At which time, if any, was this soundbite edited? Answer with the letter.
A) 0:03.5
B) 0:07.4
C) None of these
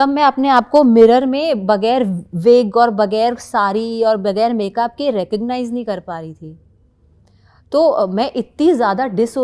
C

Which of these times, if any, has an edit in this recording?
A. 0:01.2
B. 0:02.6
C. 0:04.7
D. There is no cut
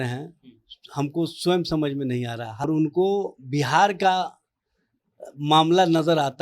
B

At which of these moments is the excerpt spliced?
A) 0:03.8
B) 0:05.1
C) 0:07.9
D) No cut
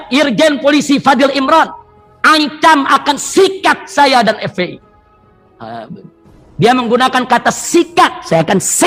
D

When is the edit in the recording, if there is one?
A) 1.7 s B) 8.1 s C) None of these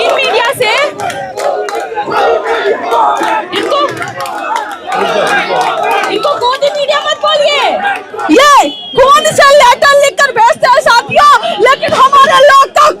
B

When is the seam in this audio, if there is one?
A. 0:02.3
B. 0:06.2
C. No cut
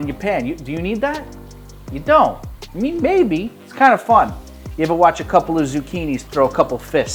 B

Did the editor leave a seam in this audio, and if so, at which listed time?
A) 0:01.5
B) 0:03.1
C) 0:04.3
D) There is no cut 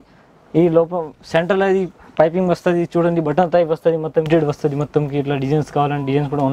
C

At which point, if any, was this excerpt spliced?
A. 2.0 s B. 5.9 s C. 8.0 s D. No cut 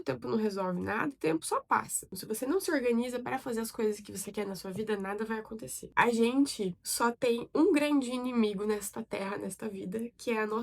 B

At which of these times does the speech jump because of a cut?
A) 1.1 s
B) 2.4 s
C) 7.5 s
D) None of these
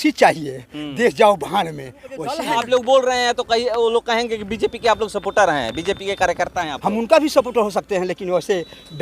B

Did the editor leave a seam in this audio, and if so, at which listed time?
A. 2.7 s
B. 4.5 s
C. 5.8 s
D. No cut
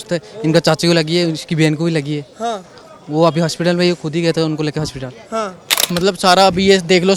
C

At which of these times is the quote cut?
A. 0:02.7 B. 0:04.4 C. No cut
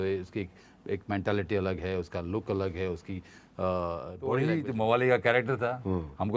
B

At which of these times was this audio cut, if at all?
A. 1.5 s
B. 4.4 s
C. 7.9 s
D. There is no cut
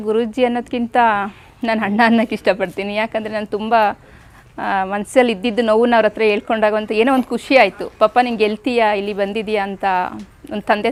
D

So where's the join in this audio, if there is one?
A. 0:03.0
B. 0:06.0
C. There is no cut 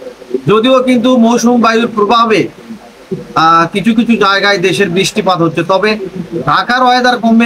C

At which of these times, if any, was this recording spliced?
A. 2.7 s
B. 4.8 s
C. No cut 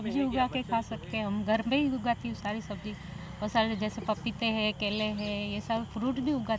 C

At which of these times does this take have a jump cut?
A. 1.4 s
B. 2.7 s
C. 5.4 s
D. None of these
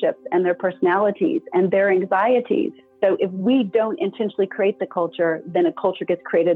B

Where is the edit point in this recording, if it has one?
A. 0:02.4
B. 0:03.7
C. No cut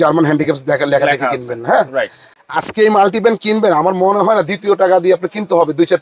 A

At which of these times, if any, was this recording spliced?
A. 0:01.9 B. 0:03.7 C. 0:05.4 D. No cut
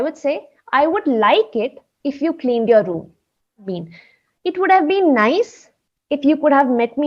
B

